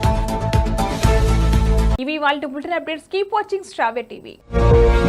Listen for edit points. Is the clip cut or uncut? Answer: uncut